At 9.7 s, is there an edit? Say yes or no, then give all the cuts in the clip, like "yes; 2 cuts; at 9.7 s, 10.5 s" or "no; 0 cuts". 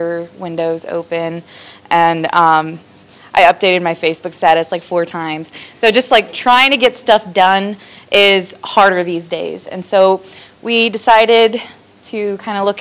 no; 1 cut; at 5.8 s